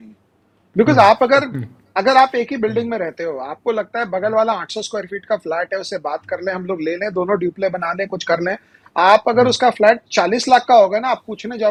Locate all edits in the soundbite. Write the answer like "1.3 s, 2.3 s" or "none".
none